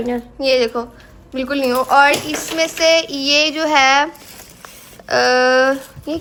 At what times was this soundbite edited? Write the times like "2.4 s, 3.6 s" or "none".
none